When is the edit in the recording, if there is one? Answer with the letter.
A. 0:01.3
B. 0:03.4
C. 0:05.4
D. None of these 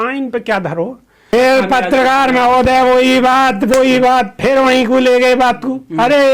A